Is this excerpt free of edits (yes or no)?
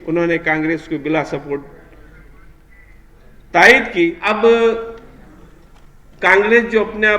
no